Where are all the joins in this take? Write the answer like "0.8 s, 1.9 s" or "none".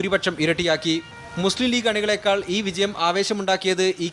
none

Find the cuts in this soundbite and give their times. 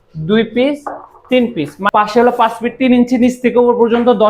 1.8 s

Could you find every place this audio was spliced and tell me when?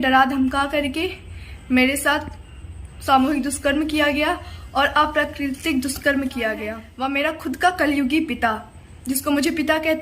6.8 s

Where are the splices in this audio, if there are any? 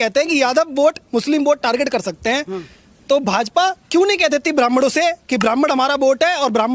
none

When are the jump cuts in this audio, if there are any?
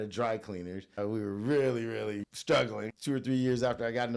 1.0 s, 2.3 s, 2.9 s

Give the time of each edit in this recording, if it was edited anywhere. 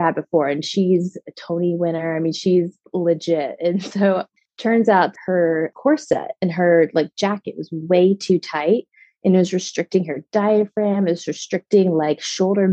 4.3 s, 5.1 s

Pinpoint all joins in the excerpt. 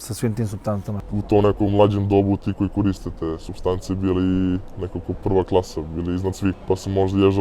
1.1 s

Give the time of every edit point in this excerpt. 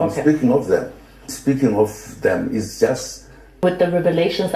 3.6 s

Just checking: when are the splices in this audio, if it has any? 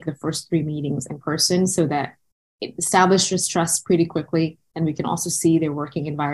none

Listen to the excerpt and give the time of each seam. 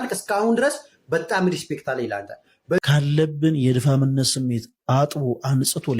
2.8 s

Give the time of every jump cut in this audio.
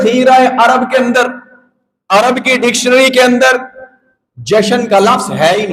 none

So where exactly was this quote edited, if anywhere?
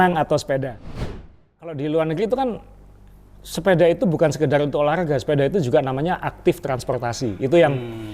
1.3 s

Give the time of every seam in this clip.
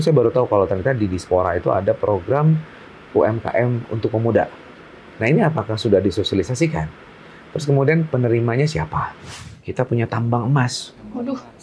9.6 s

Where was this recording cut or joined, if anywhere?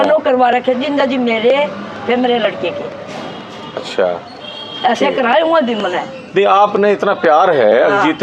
none

